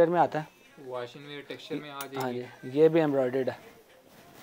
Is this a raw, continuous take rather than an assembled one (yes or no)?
yes